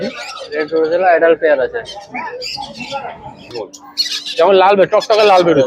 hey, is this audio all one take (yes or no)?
no